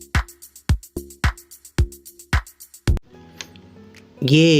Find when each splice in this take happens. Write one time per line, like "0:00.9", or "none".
0:03.1